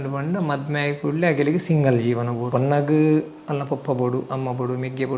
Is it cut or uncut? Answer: cut